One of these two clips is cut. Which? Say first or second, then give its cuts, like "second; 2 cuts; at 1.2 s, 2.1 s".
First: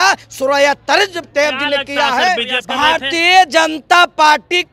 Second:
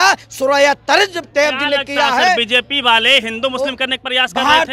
first; 1 cut; at 2.6 s